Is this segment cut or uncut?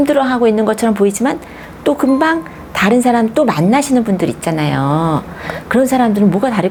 uncut